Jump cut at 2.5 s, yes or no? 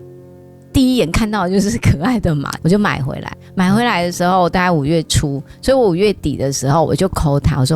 yes